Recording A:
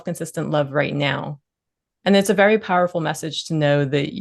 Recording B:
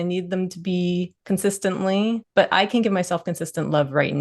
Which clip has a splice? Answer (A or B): B